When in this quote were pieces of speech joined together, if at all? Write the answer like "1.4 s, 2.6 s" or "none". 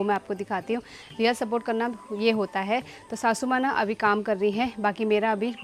none